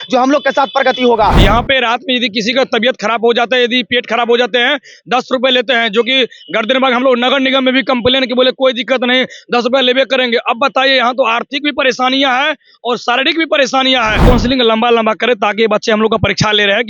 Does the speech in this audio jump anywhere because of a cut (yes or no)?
yes